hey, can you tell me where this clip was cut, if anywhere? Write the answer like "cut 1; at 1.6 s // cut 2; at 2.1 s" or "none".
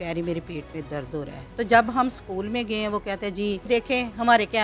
cut 1; at 1.4 s // cut 2; at 3.7 s